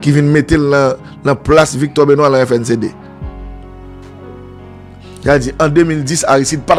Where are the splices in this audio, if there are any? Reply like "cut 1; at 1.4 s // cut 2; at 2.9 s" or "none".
none